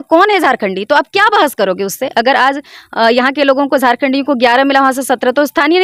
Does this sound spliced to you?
no; 0 cuts

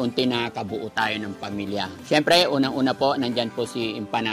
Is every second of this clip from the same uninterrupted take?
no; 1 cut; at 2.0 s

